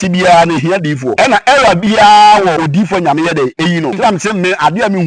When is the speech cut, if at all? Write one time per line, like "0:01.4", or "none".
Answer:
0:01.1
0:02.6
0:04.0